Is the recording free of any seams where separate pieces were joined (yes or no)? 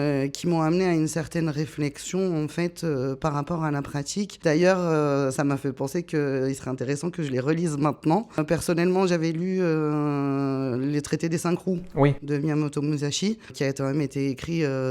no